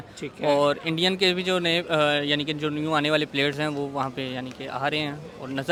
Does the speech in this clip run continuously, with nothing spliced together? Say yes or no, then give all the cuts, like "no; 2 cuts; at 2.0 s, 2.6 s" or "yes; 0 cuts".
yes; 0 cuts